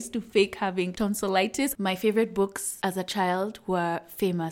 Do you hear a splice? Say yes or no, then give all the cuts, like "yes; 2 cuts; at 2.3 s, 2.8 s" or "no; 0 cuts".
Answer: yes; 2 cuts; at 1.3 s, 2.7 s